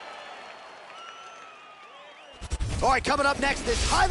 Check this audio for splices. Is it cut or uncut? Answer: cut